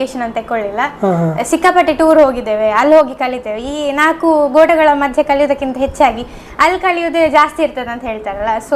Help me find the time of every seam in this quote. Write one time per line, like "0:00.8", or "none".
0:01.4